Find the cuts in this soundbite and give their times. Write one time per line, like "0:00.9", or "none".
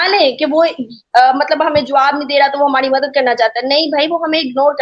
none